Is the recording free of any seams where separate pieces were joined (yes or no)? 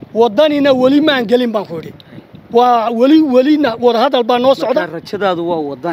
yes